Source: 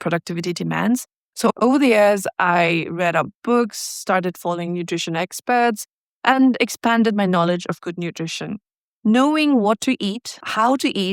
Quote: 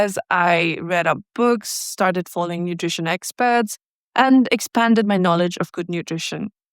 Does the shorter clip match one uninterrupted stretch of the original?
yes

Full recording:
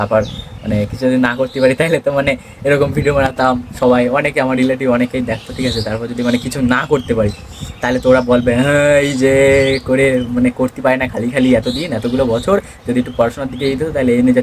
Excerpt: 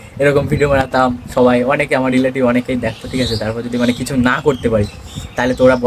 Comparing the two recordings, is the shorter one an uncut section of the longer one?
yes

